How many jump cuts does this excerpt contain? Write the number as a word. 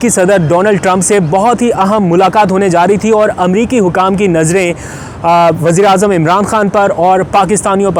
zero